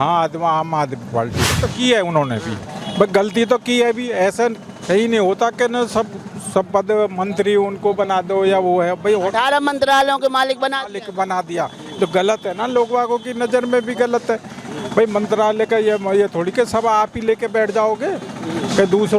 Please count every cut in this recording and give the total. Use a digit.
1